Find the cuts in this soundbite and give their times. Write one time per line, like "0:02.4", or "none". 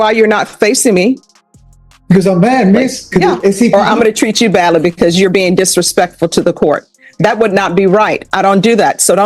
0:03.7